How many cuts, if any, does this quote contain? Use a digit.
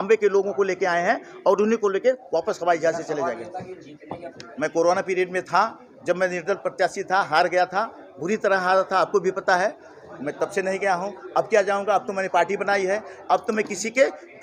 1